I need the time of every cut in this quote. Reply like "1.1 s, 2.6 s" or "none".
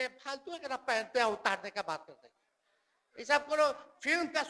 none